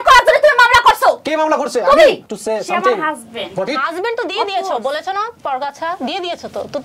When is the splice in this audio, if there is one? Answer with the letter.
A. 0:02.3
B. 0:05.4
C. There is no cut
A